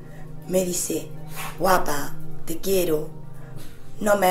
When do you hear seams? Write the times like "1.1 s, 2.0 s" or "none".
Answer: none